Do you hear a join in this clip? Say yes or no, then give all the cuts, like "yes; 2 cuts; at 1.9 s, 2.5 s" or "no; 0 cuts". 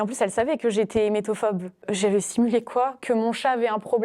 yes; 1 cut; at 1.8 s